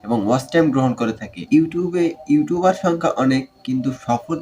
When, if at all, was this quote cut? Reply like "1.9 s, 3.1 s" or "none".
1.4 s